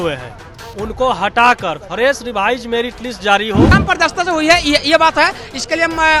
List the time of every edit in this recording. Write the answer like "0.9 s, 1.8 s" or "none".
3.7 s